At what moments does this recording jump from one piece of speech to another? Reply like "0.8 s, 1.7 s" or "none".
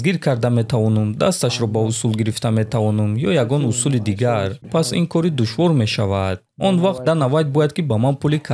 4.7 s